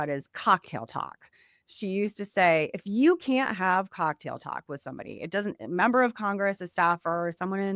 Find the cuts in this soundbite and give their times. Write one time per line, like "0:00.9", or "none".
none